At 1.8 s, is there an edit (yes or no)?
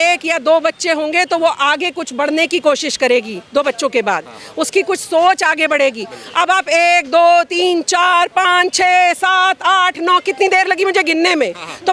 no